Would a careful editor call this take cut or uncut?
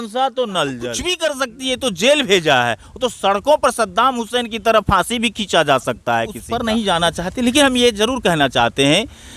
cut